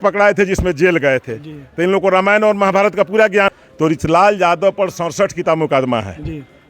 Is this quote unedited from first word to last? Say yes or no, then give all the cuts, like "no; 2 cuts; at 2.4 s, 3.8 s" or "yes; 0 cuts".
no; 1 cut; at 3.5 s